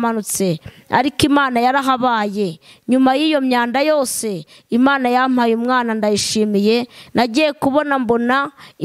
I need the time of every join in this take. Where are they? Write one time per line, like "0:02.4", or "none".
0:07.0